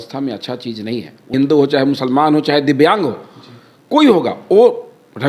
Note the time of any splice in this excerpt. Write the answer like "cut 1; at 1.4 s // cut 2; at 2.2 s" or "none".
cut 1; at 1.3 s